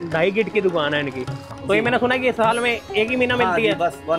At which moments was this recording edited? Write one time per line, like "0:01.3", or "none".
0:01.6